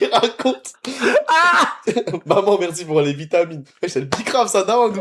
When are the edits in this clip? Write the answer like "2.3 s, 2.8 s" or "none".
none